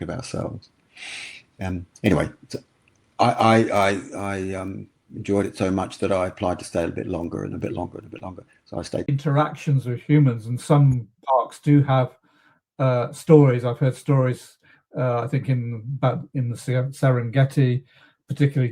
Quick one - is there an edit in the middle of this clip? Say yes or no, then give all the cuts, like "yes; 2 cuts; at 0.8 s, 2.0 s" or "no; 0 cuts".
yes; 1 cut; at 9.1 s